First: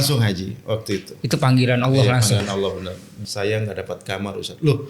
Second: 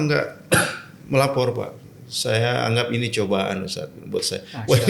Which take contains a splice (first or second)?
first